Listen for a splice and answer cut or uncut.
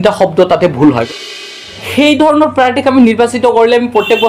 cut